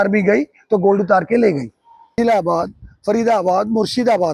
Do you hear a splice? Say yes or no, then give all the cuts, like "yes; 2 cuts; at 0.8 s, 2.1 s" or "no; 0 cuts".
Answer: yes; 1 cut; at 2.2 s